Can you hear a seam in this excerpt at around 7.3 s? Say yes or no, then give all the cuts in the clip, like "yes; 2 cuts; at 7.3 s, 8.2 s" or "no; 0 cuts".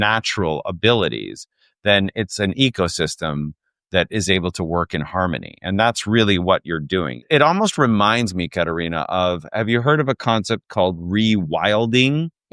yes; 1 cut; at 7.3 s